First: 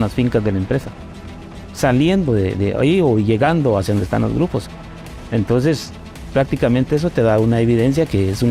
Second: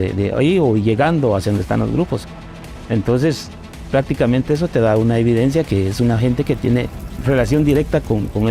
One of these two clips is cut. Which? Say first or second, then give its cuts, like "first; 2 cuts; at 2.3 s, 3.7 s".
second; 1 cut; at 7.1 s